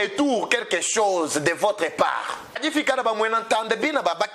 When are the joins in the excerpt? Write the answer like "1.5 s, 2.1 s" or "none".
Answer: 2.6 s